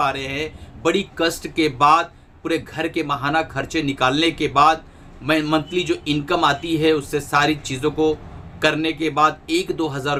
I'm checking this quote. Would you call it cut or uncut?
uncut